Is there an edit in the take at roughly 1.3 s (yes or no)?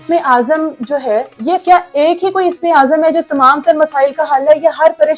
yes